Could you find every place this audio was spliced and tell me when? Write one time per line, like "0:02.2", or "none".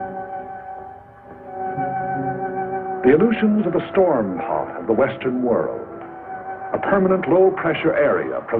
0:01.6